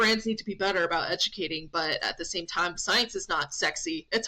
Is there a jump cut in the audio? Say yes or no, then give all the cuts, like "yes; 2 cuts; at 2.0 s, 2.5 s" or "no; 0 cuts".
no; 0 cuts